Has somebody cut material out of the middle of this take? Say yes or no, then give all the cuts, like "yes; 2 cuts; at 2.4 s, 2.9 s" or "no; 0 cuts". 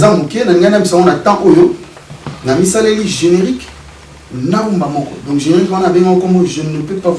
no; 0 cuts